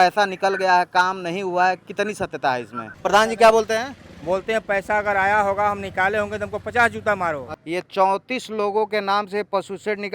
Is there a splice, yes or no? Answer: yes